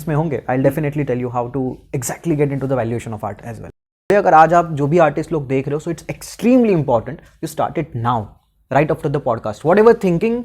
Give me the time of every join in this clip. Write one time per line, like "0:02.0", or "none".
0:04.1